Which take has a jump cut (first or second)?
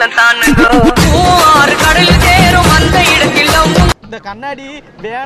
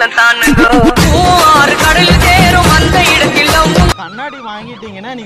first